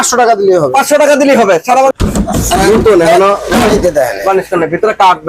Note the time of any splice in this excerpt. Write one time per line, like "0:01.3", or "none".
0:01.9

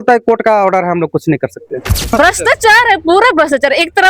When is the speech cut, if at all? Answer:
0:02.1

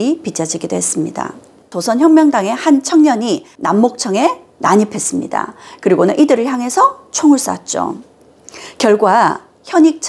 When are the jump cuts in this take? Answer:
0:01.8

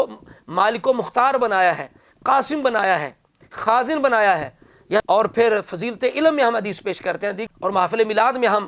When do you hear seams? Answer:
0:05.0
0:07.4

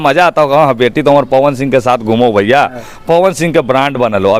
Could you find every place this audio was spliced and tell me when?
none

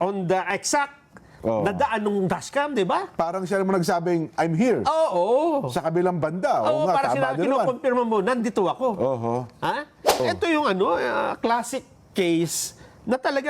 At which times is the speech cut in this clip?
0:10.2

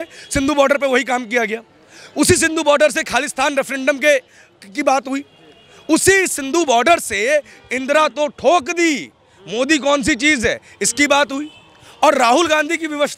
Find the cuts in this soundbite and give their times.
none

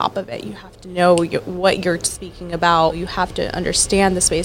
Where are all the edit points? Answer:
0:03.0

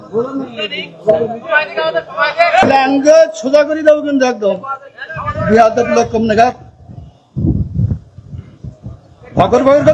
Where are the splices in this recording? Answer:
0:02.6

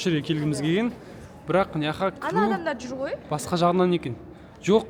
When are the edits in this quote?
none

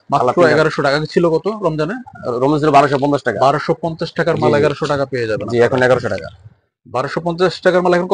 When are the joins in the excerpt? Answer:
none

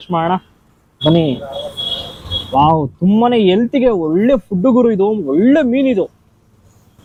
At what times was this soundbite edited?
none

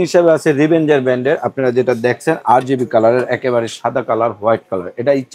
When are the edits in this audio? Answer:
none

